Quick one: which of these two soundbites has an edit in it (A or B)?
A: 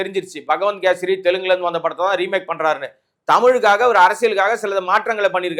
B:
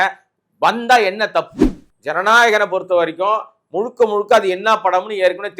B